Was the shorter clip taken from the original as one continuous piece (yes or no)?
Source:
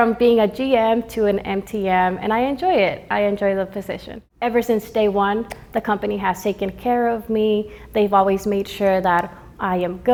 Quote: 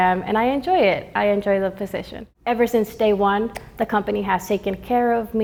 yes